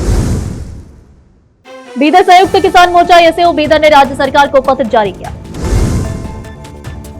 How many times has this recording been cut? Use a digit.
1